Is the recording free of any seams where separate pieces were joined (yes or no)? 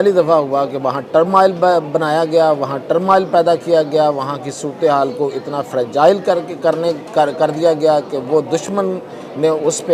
yes